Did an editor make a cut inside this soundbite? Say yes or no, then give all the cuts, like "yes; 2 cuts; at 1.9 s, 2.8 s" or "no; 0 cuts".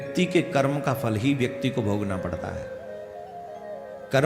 no; 0 cuts